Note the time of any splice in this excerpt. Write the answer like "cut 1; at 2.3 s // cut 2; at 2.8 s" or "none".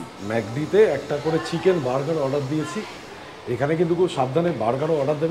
none